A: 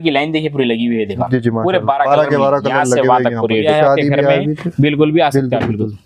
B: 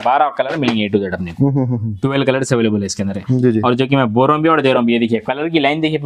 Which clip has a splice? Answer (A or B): A